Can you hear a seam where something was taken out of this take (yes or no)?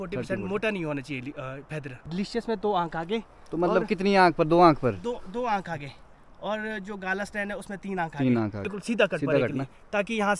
yes